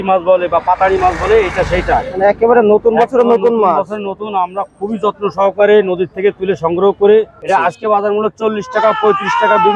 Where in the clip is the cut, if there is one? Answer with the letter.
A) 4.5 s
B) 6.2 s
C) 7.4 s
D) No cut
C